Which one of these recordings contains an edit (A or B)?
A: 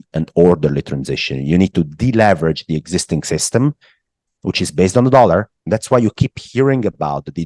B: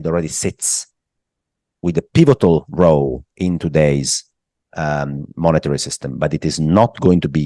A